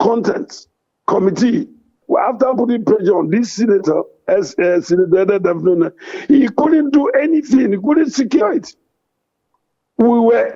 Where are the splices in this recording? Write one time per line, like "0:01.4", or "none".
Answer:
0:02.0

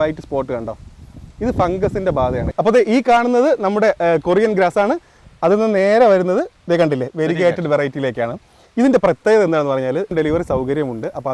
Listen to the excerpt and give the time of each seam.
0:02.4
0:10.1

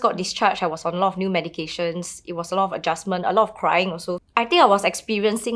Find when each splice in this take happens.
0:04.1

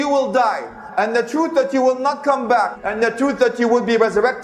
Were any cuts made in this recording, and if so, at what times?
0:02.8

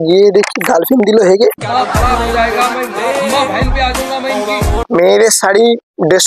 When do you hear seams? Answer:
0:04.9

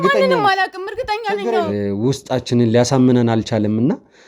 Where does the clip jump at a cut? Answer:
0:01.7

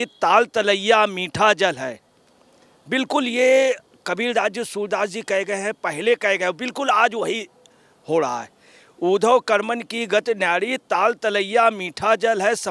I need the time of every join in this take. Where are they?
none

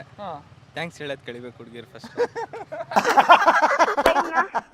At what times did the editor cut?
none

